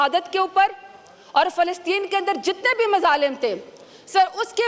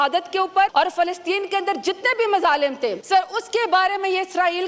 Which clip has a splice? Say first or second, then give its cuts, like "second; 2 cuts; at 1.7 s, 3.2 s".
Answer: second; 2 cuts; at 0.7 s, 3.0 s